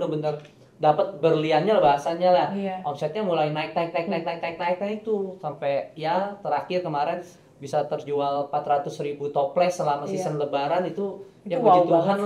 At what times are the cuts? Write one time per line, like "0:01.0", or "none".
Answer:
none